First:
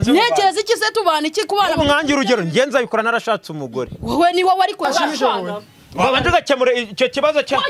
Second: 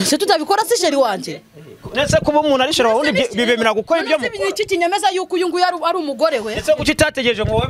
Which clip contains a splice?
first; 1 cut; at 4.8 s

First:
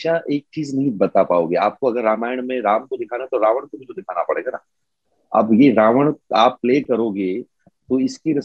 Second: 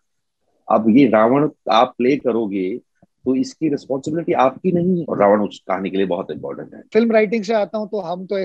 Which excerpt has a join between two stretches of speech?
second; 2 cuts; at 5.0 s, 6.9 s

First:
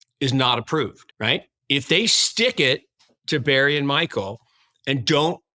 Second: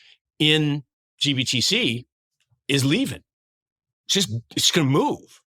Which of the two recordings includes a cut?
first; 1 cut; at 1.0 s

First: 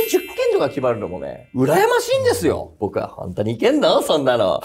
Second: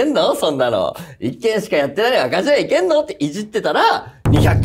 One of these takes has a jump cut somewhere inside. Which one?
first; 1 cut; at 2.7 s

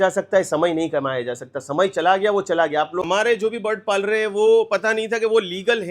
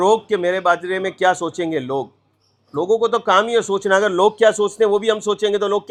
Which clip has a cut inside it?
first; 1 cut; at 3.0 s

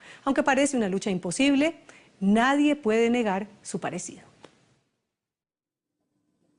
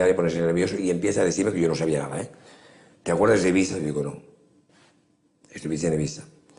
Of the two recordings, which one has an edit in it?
second; 1 cut; at 2.4 s

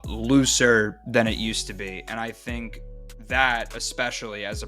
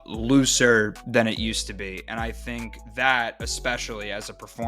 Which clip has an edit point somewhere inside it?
second; 1 cut; at 2.8 s

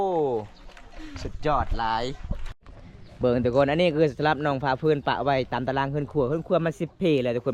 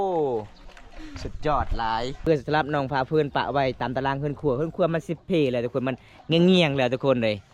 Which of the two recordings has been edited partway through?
second; 1 cut; at 2.2 s

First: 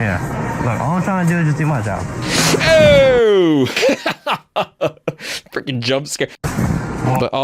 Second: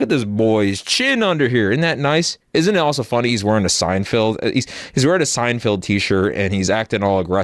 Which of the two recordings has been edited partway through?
first; 1 cut; at 6.3 s

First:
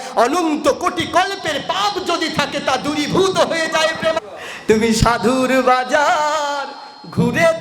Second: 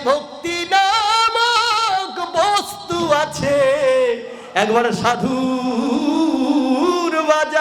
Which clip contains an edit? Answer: first; 1 cut; at 4.2 s

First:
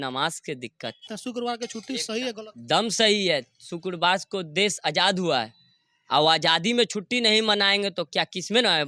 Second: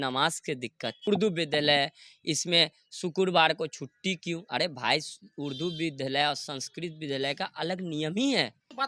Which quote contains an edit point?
first; 1 cut; at 1.0 s

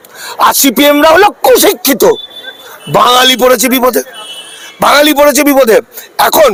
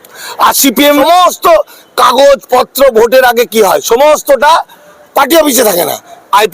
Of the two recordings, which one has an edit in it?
second; 1 cut; at 1.0 s

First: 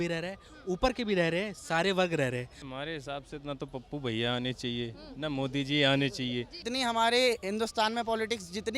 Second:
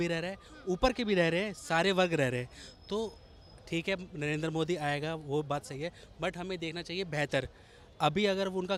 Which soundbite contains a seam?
first; 2 cuts; at 2.6 s, 6.6 s

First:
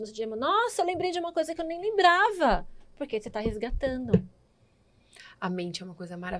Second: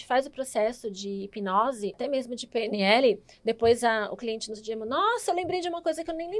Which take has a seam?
second; 1 cut; at 2.0 s

